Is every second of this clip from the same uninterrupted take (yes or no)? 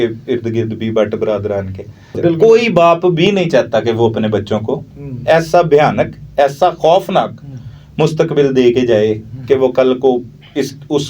no